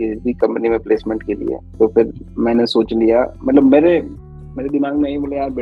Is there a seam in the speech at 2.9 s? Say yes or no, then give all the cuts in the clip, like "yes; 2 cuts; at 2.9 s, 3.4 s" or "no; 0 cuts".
no; 0 cuts